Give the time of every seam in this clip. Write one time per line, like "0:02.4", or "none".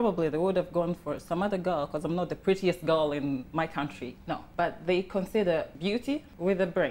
0:04.5
0:06.0